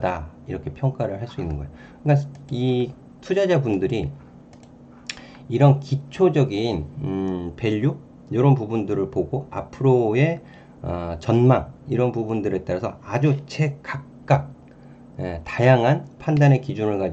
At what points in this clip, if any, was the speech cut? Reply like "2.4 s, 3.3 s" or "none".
none